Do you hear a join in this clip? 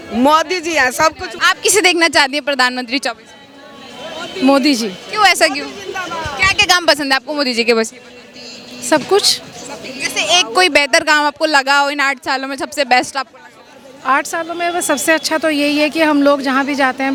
no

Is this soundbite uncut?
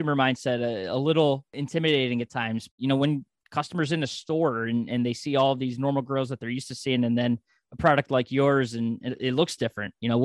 no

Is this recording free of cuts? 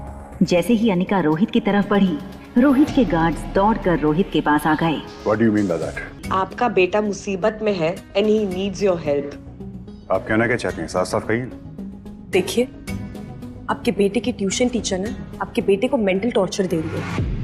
no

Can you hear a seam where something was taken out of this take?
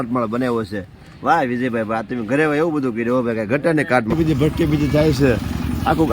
yes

